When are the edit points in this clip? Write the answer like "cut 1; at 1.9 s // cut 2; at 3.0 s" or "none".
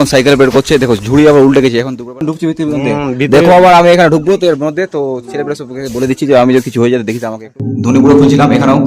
cut 1; at 2.0 s // cut 2; at 7.5 s